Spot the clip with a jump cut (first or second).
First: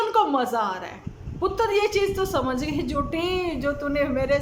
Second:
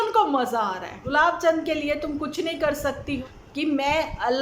second